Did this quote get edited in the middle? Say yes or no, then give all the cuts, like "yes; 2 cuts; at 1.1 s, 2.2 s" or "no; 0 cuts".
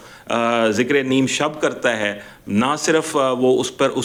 no; 0 cuts